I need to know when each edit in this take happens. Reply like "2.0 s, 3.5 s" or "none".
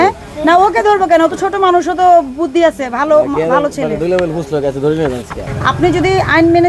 5.4 s